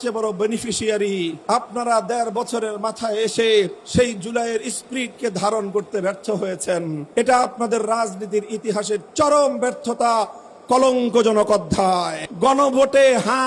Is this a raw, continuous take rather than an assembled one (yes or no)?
no